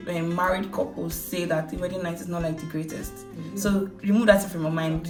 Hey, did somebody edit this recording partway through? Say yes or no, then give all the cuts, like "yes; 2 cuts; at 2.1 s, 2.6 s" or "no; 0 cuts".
no; 0 cuts